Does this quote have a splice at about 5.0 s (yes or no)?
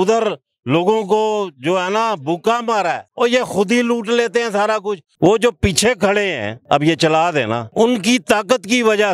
yes